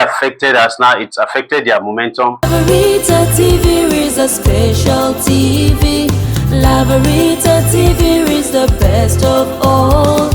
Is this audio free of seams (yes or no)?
no